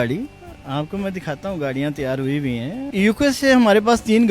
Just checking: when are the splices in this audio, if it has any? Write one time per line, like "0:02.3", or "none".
0:02.9